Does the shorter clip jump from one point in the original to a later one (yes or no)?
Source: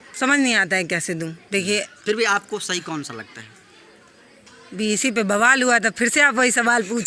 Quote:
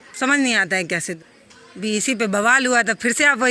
yes